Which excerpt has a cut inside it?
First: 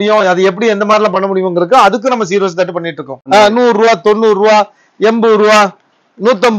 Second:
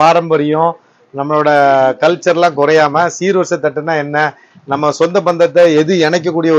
first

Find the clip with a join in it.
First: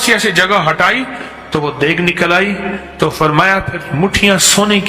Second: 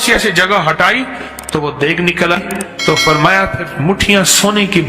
second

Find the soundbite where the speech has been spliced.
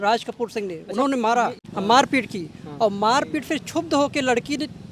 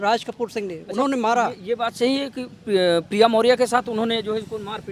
first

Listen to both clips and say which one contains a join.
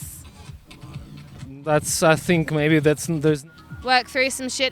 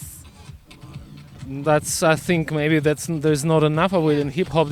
first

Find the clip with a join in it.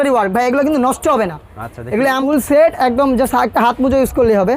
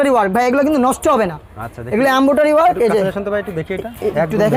first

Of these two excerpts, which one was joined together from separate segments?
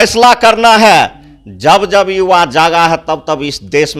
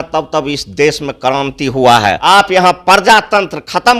second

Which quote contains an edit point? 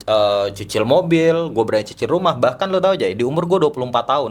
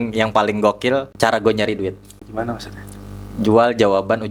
second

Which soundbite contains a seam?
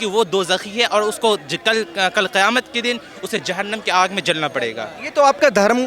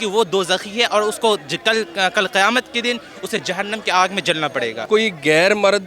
second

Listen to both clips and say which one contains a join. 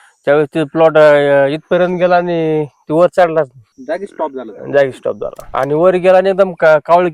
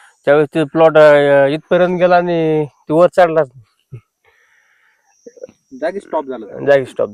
first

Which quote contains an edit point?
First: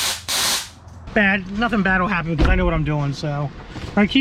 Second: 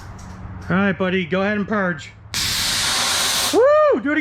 first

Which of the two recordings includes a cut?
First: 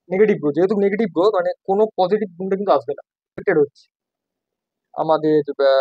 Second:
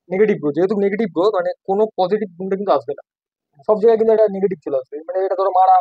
first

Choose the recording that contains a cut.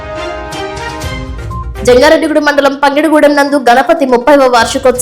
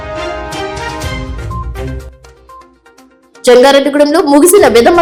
first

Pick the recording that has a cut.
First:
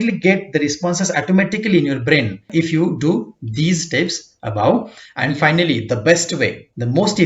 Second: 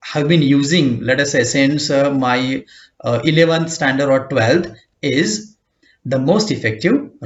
first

